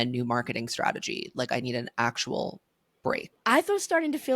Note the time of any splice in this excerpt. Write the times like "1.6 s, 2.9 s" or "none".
3.3 s

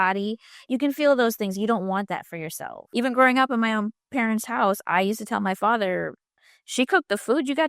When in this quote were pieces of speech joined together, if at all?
2.7 s

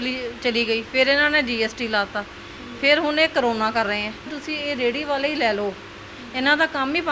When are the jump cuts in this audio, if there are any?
4.4 s

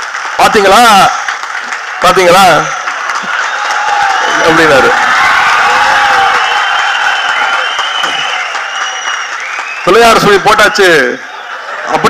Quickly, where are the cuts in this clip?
none

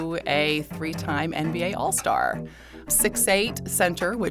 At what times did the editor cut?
2.9 s

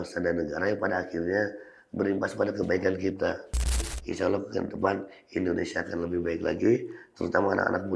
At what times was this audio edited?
3.9 s

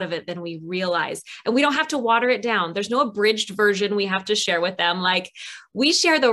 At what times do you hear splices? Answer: none

